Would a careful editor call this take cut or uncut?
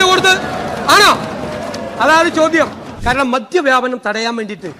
cut